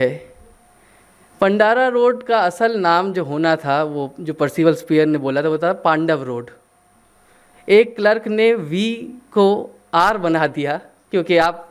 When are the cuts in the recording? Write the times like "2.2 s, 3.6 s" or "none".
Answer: none

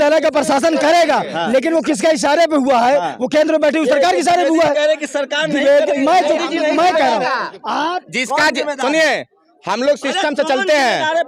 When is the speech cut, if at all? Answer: none

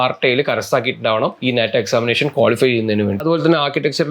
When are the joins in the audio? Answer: 3.2 s

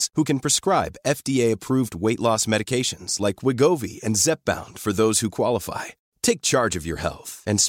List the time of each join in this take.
none

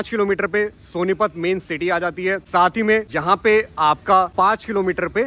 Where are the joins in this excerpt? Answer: none

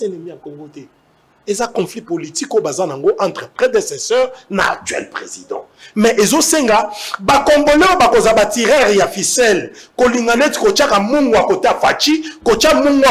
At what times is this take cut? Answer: none

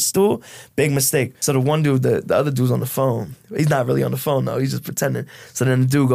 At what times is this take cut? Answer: 1.3 s

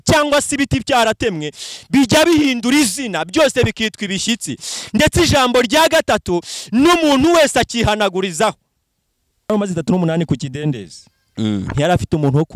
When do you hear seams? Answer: 9.5 s

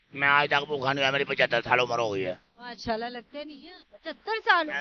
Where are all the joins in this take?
none

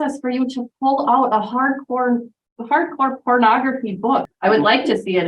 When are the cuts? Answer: 4.3 s

